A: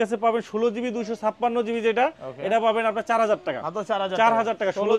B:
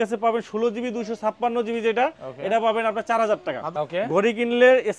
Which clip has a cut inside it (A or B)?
B